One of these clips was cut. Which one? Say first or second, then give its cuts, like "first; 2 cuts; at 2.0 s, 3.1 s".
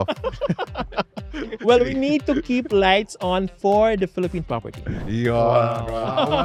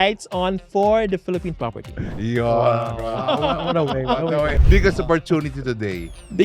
second; 1 cut; at 4.6 s